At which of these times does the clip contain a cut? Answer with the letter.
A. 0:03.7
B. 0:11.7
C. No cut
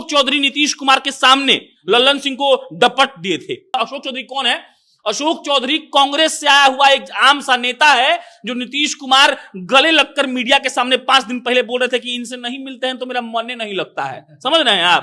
A